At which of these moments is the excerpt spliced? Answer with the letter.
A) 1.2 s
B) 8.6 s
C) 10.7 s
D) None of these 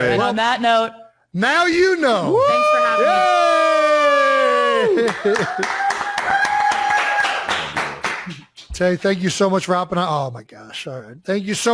D